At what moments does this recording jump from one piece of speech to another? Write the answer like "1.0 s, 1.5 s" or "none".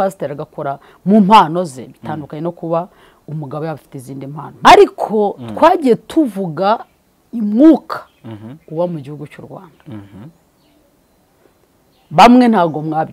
4.7 s